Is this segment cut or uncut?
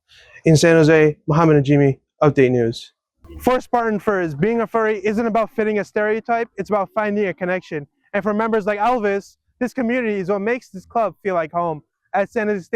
cut